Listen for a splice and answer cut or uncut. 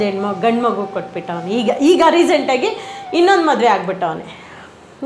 uncut